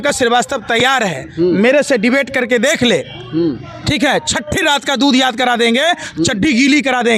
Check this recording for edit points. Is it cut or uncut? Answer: uncut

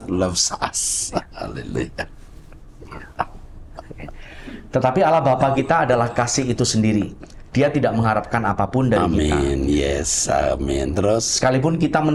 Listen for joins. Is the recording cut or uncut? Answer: uncut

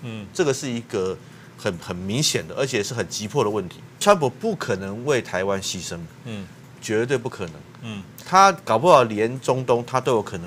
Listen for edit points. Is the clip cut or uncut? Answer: cut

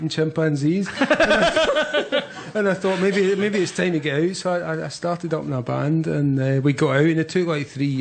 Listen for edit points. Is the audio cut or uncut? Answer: cut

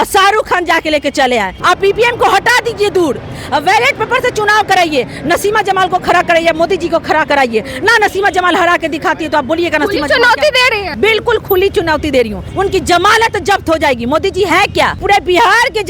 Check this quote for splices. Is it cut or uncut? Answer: cut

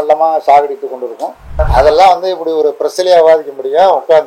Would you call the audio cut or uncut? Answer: cut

